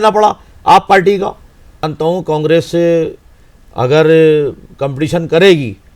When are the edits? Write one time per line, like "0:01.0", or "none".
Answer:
0:01.9